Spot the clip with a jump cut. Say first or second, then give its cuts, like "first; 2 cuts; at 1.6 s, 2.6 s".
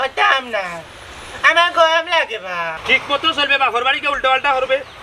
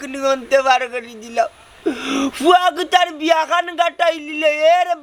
first; 1 cut; at 2.7 s